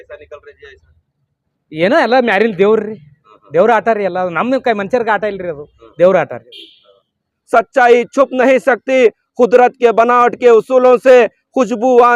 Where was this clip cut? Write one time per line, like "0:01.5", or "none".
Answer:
0:07.4